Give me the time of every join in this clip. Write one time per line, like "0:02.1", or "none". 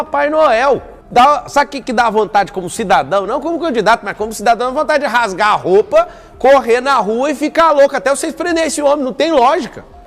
0:01.0